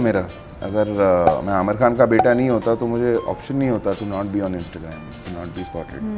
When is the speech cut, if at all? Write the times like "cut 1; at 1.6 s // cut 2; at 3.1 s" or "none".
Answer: none